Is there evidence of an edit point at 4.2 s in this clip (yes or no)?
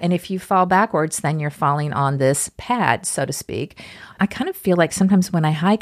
yes